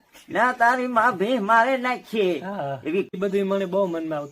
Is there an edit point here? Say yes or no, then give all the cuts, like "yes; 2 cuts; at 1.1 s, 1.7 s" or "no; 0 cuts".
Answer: yes; 1 cut; at 3.1 s